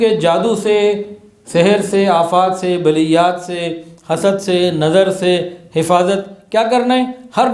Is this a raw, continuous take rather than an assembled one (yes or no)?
yes